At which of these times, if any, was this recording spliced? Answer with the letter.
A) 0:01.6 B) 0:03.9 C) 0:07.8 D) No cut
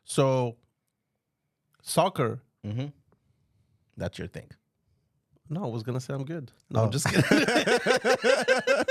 D